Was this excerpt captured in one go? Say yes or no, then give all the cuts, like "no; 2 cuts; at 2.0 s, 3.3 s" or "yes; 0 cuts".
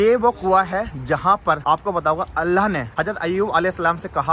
no; 2 cuts; at 1.6 s, 2.9 s